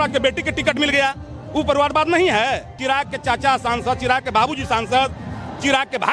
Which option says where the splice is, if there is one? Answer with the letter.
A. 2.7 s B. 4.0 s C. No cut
A